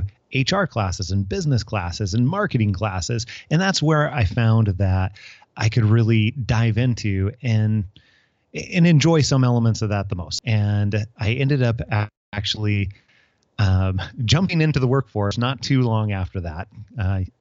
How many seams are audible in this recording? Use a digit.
1